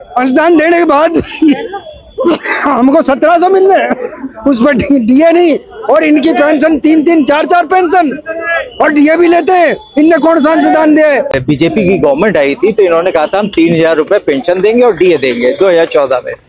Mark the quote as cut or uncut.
cut